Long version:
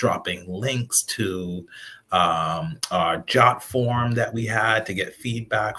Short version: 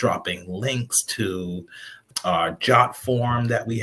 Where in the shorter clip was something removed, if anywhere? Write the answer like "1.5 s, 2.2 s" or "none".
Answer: 2.0 s